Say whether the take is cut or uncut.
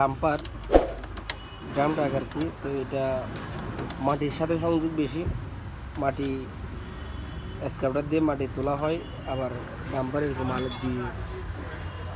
uncut